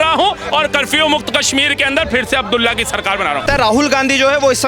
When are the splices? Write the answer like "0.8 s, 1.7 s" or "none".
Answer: 3.4 s